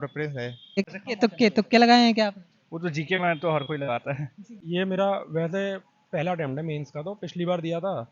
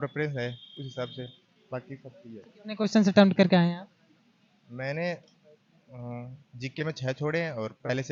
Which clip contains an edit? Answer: first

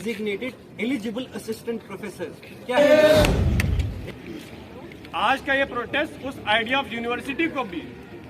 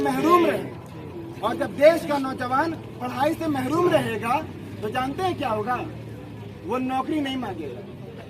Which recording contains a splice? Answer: first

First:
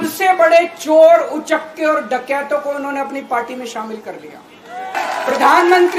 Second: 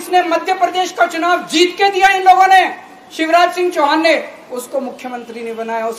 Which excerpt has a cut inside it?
first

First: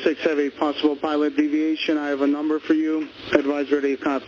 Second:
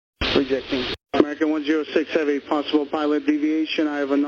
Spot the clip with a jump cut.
second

